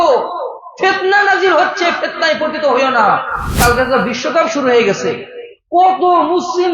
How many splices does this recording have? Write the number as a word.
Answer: one